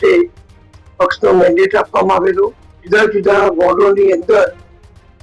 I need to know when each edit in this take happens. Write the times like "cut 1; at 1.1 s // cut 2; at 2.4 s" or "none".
cut 1; at 2.7 s